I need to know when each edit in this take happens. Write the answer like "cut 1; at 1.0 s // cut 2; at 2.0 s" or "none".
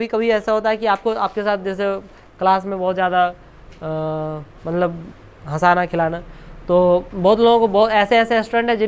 none